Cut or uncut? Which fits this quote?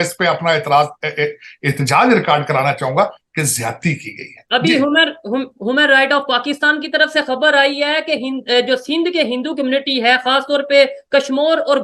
cut